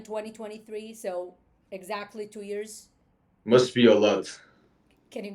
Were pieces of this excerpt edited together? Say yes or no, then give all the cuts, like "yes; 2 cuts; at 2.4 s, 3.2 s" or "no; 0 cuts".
no; 0 cuts